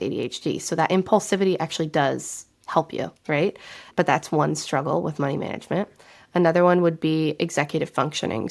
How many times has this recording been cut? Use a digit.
0